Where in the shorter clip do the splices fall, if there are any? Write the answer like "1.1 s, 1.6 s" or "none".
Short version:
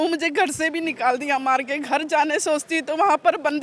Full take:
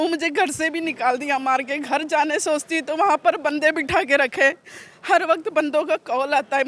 none